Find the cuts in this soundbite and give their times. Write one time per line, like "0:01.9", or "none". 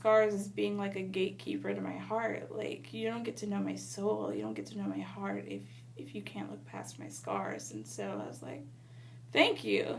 none